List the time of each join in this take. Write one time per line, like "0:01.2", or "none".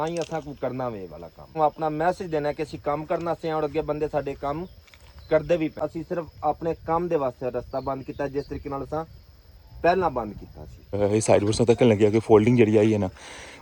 0:01.5
0:05.7
0:11.0

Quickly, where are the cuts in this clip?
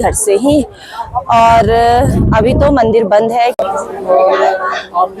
0:03.5

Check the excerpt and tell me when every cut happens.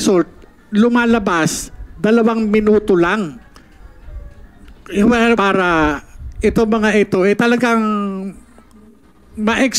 0:05.4

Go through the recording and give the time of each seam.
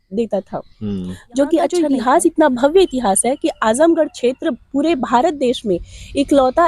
0:01.7

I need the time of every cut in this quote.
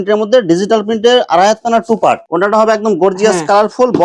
0:02.2

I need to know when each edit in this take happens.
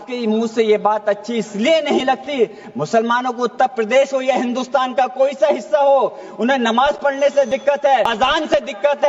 0:08.1

